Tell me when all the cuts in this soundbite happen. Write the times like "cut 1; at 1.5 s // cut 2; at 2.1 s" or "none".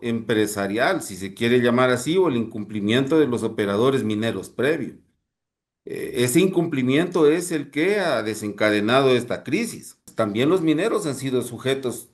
cut 1; at 10.1 s